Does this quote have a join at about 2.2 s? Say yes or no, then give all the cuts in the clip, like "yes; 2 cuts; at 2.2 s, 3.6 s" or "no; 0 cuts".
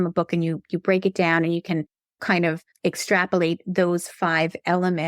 yes; 1 cut; at 2.2 s